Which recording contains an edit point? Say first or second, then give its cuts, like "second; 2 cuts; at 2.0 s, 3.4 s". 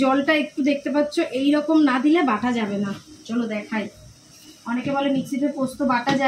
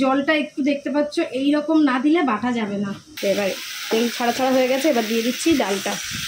second; 1 cut; at 3.0 s